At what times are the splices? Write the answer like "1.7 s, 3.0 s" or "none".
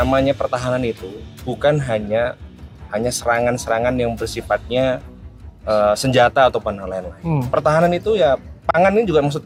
none